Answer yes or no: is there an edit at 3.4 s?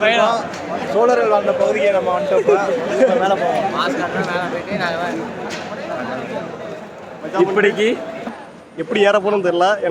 no